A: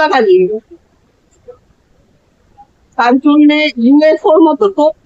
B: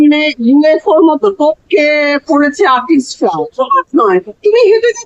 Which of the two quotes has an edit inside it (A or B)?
B